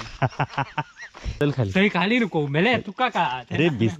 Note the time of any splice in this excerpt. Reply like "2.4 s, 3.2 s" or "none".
1.4 s